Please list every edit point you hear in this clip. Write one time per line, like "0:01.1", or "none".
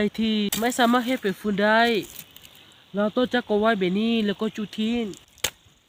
none